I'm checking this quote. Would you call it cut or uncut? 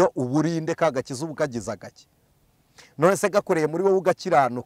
uncut